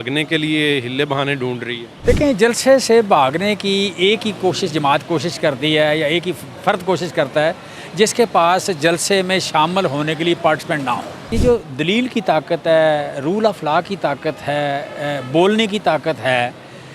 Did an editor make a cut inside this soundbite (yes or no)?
yes